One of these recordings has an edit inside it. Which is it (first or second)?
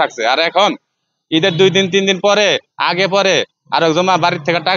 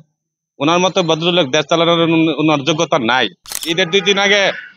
second